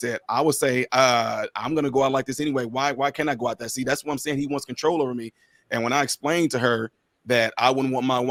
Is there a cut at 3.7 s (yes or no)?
no